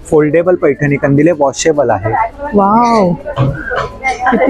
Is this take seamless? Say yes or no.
yes